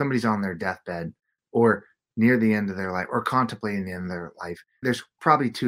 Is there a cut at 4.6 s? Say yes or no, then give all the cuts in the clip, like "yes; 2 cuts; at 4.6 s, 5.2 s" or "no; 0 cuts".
yes; 1 cut; at 4.6 s